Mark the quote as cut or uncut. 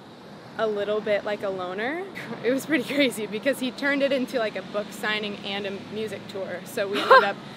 cut